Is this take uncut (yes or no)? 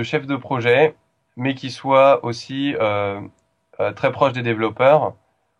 yes